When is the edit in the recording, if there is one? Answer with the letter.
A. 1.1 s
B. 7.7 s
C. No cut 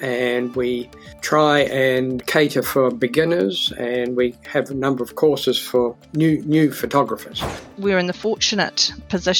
B